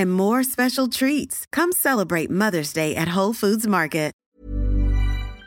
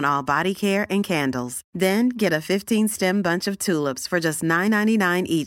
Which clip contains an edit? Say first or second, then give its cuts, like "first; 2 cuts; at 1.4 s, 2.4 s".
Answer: first; 1 cut; at 4.2 s